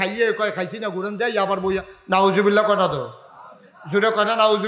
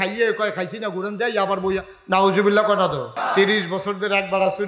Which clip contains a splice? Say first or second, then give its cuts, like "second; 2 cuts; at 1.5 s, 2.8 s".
second; 1 cut; at 3.1 s